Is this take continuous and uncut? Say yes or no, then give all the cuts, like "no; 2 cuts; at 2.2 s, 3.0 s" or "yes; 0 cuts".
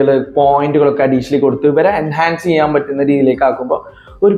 yes; 0 cuts